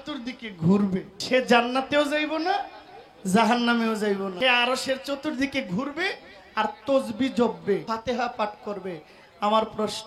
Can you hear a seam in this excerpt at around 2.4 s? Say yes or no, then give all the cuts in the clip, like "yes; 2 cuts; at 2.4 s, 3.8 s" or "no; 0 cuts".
no; 3 cuts; at 1.1 s, 4.3 s, 7.8 s